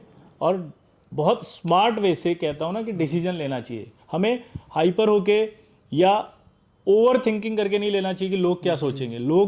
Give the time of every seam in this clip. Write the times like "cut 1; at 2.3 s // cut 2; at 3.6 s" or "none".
none